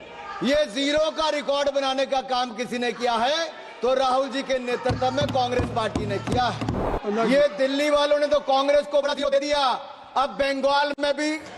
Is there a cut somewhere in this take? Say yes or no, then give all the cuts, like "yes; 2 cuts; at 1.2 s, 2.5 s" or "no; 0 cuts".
yes; 1 cut; at 6.8 s